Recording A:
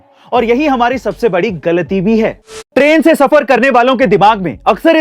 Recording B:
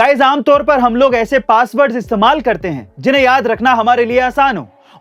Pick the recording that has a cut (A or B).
A